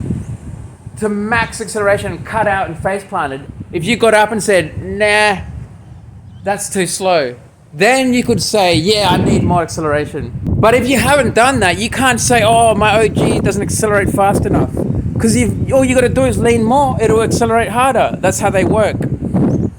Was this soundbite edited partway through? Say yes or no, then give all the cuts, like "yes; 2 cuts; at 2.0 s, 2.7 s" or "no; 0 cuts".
yes; 2 cuts; at 3.4 s, 10.4 s